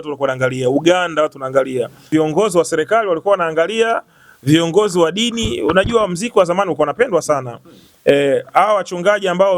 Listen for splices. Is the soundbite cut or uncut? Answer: cut